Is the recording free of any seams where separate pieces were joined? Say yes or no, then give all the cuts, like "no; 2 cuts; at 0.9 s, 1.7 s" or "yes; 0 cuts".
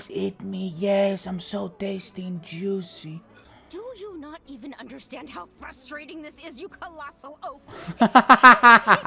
no; 1 cut; at 3.4 s